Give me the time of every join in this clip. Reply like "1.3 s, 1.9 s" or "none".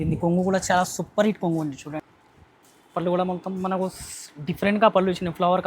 2.0 s

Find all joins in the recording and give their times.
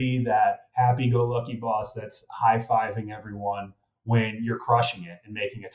none

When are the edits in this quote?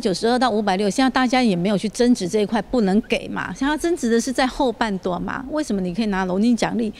none

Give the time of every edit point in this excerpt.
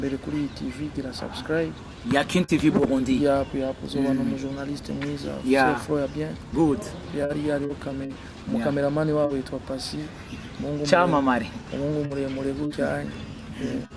none

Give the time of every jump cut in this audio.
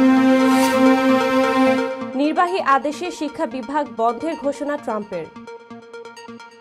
none

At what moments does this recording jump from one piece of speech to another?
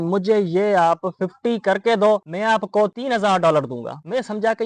none

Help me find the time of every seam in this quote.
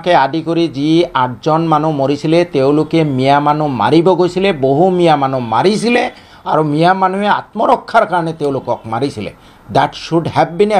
none

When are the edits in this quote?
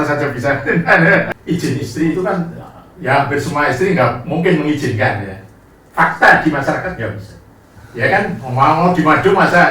1.3 s

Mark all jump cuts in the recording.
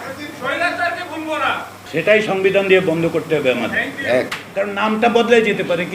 1.8 s, 4.4 s

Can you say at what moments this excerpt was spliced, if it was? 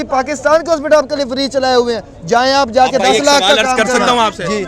none

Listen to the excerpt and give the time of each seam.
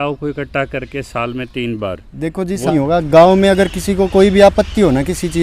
2.7 s

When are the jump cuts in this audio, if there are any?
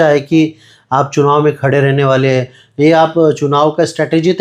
none

